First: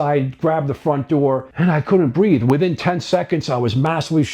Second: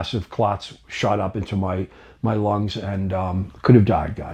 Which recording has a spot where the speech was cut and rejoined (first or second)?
first